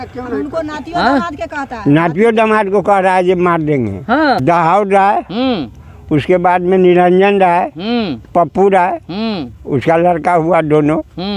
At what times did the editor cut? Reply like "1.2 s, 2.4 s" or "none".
4.4 s